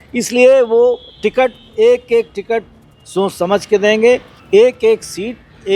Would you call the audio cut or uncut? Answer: cut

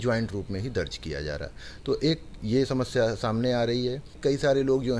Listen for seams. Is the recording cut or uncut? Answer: cut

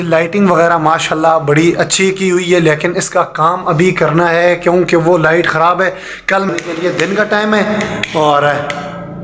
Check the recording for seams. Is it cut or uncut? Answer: cut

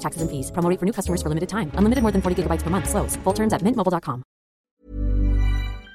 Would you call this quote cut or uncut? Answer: cut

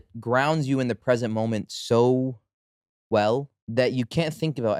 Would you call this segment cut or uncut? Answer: cut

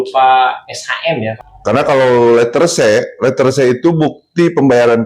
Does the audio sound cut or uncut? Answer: cut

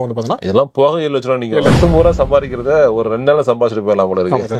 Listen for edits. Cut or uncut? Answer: cut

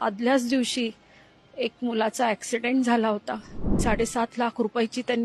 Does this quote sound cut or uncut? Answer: cut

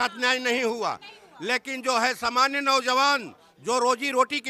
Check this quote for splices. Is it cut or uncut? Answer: uncut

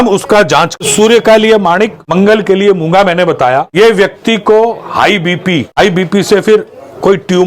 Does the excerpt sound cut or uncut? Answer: cut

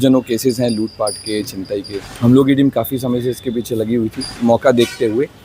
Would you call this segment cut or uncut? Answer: cut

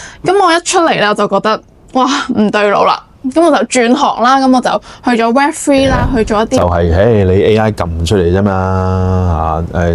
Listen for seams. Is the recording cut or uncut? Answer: cut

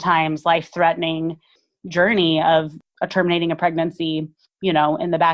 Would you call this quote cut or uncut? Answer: cut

